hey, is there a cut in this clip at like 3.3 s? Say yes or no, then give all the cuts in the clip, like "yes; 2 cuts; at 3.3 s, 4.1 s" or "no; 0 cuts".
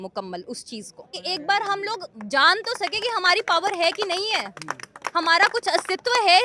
no; 1 cut; at 1.2 s